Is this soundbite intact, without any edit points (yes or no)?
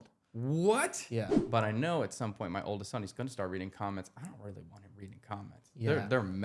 no